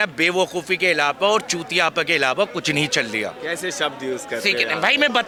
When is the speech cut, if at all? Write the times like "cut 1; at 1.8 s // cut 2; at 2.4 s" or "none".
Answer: none